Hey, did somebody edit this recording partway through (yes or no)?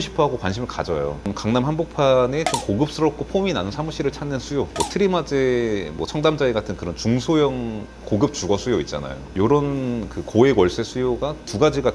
yes